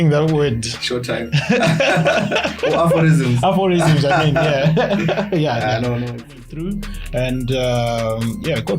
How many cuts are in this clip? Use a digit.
1